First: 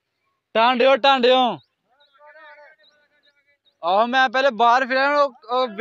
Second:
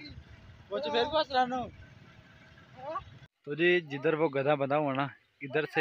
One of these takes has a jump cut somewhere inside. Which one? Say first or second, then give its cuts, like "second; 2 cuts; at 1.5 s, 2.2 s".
second; 1 cut; at 3.4 s